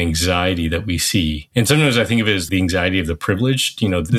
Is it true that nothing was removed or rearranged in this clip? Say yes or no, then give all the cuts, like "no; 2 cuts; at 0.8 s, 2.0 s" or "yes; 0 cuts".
no; 2 cuts; at 1.4 s, 2.4 s